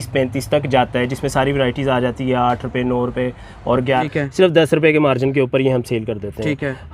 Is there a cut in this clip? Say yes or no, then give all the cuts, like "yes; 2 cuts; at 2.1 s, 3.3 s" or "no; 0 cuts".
yes; 1 cut; at 4.0 s